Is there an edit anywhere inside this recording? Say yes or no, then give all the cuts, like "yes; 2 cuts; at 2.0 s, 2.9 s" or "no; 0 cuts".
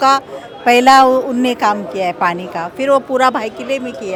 no; 0 cuts